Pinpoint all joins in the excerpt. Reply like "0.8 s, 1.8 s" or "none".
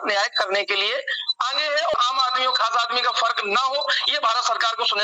1.9 s

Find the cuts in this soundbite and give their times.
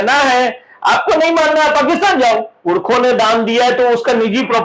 2.5 s

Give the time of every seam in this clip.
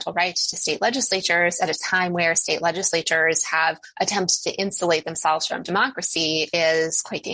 none

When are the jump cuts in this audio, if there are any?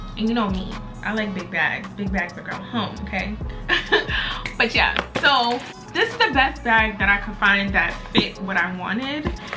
none

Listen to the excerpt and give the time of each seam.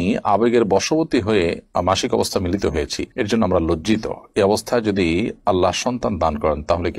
none

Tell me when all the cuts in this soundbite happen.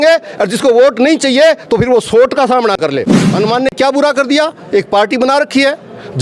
3.2 s

